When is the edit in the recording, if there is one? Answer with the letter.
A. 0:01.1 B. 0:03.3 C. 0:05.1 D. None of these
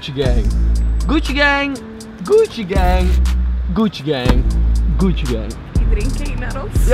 D